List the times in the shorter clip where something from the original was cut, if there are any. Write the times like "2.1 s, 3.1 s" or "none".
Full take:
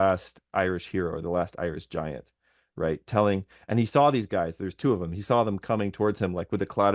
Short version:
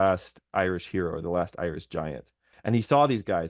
2.5 s